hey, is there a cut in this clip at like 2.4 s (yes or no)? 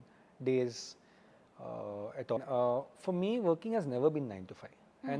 yes